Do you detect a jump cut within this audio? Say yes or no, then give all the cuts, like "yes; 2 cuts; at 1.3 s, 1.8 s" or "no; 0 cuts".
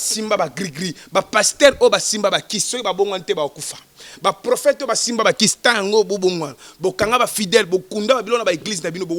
no; 0 cuts